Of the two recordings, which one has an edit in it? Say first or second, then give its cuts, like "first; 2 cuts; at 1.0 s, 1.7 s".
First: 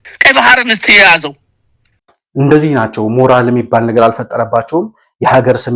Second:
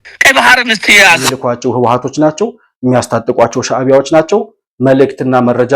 second; 1 cut; at 1.4 s